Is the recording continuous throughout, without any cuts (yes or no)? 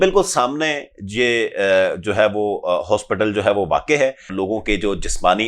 no